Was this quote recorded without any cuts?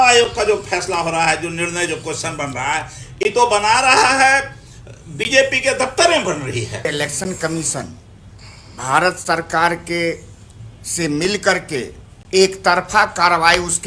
no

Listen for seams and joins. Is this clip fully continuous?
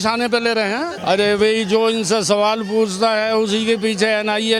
no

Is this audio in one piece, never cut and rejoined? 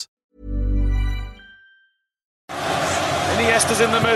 no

